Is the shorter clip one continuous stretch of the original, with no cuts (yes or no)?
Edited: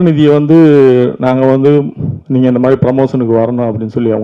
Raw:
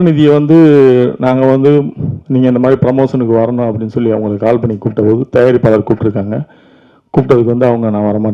yes